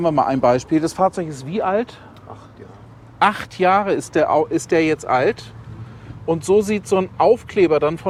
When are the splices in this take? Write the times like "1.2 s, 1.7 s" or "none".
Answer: none